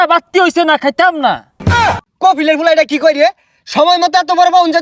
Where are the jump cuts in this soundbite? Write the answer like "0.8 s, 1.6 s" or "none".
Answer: 1.7 s